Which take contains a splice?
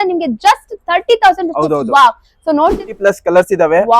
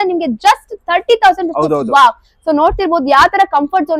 first; 1 cut; at 2.8 s

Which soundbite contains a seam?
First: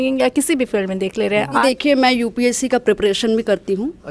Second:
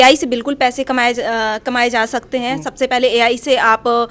first; 1 cut; at 1.6 s

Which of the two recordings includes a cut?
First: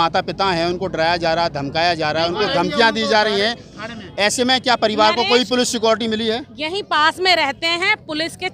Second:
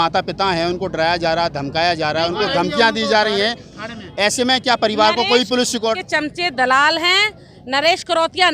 second; 1 cut; at 6.0 s

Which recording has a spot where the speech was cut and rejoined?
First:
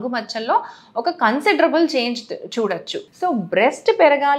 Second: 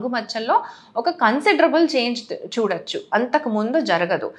first; 1 cut; at 2.9 s

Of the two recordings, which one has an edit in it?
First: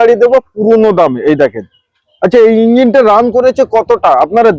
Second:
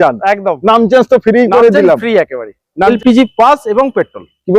second; 1 cut; at 2.9 s

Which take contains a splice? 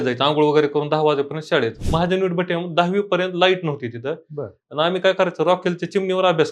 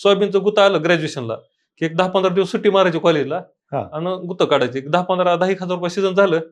first; 1 cut; at 1.8 s

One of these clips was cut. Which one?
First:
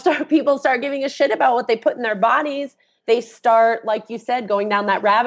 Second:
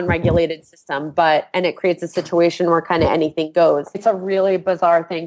second; 1 cut; at 4.0 s

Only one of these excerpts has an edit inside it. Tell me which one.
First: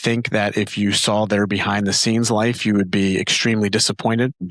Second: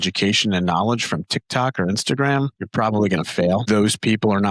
second; 2 cuts; at 2.6 s, 3.6 s

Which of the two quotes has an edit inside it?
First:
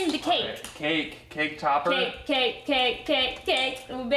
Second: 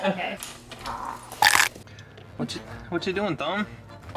second; 1 cut; at 1.8 s

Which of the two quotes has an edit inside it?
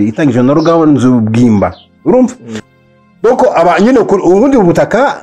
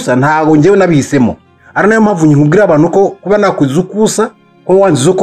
first; 1 cut; at 2.7 s

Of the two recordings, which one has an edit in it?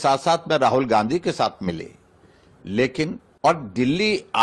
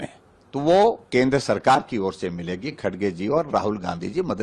first; 1 cut; at 3.2 s

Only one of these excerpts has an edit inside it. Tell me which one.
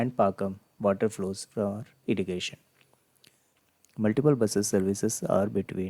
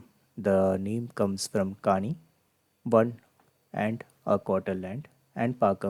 first; 1 cut; at 3.6 s

